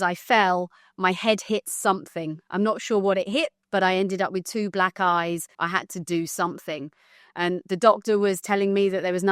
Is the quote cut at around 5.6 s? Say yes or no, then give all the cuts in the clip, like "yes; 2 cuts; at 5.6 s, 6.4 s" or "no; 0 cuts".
yes; 2 cuts; at 3.6 s, 5.6 s